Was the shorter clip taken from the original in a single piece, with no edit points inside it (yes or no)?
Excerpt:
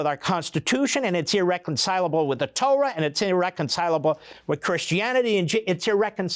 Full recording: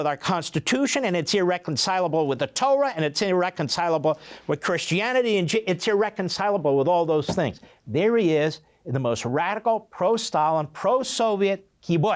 yes